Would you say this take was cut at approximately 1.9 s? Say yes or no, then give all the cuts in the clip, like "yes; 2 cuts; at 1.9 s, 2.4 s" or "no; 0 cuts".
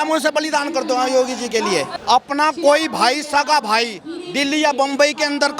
yes; 1 cut; at 1.9 s